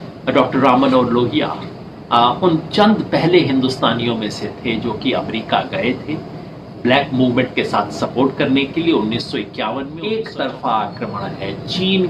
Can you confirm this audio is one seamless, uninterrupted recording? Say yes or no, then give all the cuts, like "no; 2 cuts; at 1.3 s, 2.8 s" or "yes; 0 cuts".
no; 1 cut; at 9.9 s